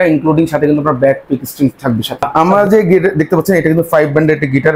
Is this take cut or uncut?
cut